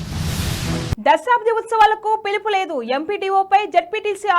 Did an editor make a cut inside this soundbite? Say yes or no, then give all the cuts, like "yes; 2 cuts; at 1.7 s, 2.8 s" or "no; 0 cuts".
yes; 1 cut; at 1.0 s